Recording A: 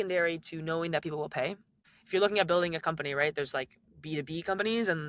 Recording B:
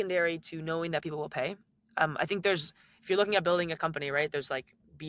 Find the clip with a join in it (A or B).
A